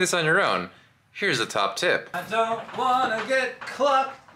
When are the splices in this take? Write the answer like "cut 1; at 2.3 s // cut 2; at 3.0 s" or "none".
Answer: cut 1; at 2.1 s